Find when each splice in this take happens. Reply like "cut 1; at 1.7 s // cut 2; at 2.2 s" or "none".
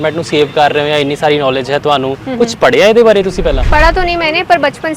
cut 1; at 3.6 s